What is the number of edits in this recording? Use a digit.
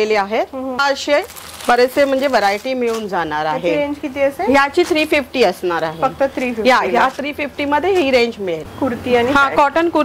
2